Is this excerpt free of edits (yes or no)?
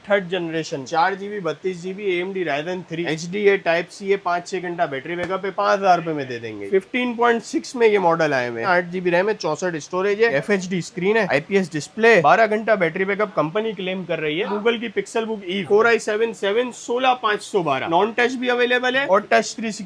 no